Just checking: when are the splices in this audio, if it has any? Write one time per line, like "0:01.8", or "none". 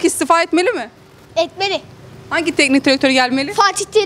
none